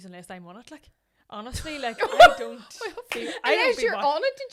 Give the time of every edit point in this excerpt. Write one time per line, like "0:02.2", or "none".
none